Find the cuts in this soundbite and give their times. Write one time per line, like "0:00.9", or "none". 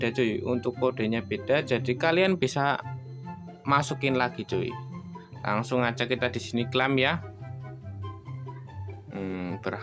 0:07.2
0:09.1